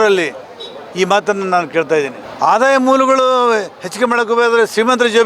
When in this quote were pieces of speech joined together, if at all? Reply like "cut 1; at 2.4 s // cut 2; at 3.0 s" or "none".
cut 1; at 2.2 s